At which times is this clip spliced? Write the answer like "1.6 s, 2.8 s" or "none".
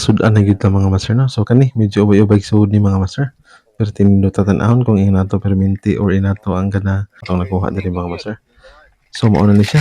7.2 s